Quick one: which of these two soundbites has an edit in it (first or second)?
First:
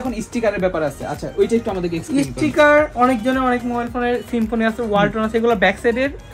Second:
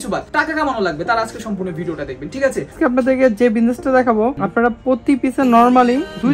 second